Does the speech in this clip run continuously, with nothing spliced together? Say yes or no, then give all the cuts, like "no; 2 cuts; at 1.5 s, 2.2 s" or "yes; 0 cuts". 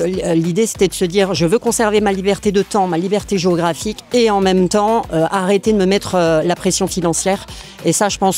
yes; 0 cuts